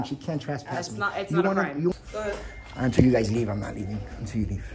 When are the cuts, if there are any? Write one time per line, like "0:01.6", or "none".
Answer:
0:01.9

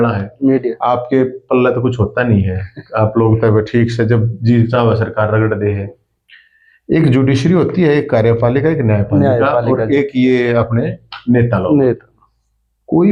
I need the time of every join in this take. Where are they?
none

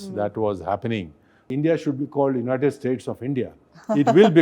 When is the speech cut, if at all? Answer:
0:01.5

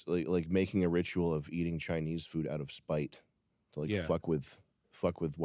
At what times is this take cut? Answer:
none

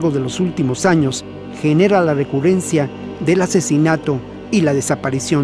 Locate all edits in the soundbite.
0:04.3

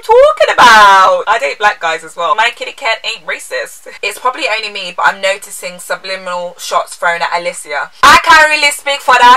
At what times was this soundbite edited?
0:01.2
0:02.4
0:03.9

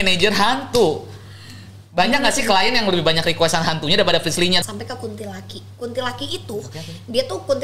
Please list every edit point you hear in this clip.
0:04.6

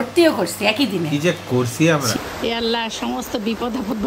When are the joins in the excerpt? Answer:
0:02.1

